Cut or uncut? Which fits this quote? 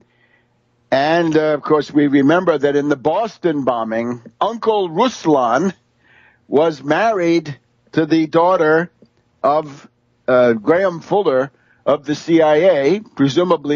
uncut